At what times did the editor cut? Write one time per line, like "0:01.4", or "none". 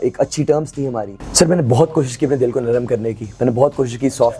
0:01.2